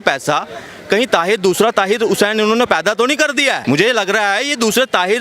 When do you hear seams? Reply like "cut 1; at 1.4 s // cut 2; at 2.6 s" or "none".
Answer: none